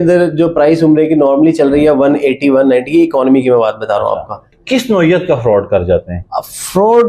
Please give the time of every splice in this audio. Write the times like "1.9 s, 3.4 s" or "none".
4.5 s